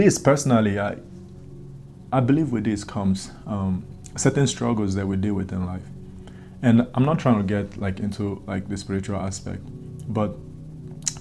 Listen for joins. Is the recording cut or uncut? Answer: uncut